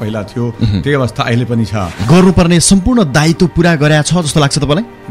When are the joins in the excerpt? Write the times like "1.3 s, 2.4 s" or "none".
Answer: 2.0 s